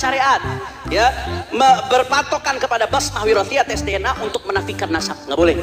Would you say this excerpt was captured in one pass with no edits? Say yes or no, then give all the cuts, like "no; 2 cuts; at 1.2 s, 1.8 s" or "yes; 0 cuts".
yes; 0 cuts